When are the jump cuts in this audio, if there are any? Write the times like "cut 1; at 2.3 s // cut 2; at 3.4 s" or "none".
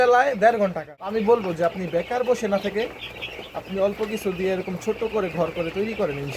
cut 1; at 0.9 s